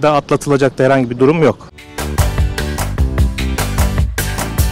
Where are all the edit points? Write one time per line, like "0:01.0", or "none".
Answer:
none